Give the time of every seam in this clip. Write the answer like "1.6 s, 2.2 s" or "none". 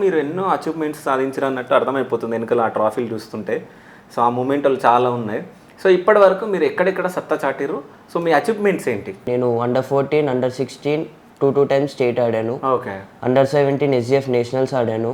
9.3 s